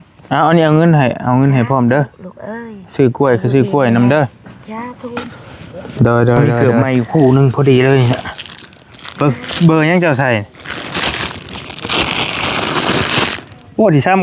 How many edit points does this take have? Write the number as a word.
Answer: two